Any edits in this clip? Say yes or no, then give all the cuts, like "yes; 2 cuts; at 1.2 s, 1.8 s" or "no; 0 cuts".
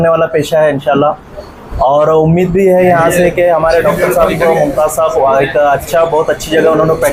no; 0 cuts